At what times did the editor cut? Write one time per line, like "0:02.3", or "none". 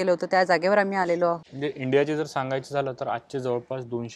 0:01.5